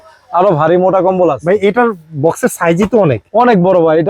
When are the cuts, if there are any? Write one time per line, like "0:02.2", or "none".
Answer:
none